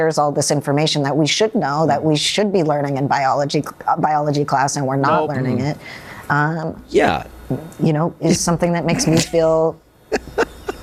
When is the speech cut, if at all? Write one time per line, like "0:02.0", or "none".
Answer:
none